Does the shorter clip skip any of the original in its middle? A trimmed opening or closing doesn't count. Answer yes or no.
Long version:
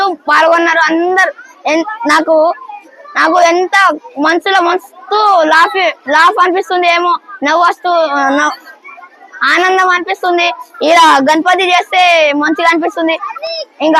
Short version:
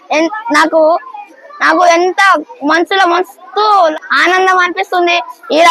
yes